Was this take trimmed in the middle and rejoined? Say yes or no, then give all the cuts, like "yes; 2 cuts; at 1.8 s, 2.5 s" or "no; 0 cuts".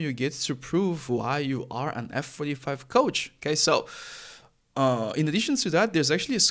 no; 0 cuts